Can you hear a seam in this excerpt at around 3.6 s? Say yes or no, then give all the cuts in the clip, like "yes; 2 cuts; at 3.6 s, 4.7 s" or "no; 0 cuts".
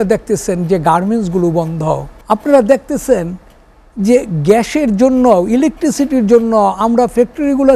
no; 1 cut; at 2.1 s